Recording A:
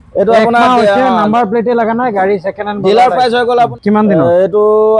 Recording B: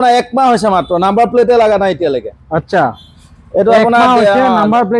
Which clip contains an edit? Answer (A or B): A